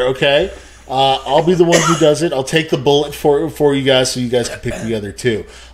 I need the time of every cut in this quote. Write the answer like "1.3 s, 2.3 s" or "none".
none